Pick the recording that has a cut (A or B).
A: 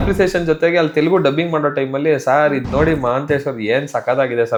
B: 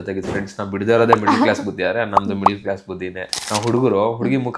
B